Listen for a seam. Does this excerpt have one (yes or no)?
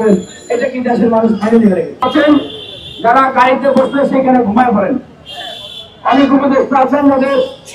yes